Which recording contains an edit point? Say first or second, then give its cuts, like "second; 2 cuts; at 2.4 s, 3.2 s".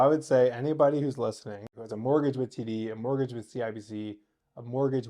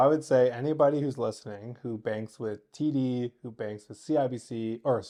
first; 1 cut; at 1.8 s